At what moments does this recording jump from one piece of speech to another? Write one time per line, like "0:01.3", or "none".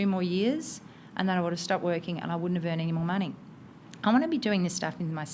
none